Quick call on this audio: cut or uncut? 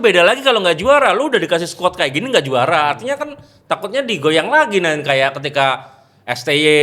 uncut